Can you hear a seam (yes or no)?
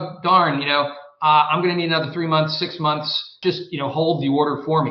yes